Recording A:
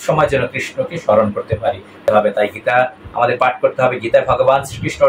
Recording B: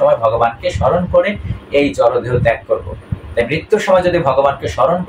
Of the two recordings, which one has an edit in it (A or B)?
A